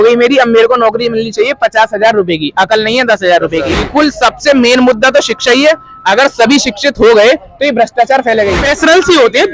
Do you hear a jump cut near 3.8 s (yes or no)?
yes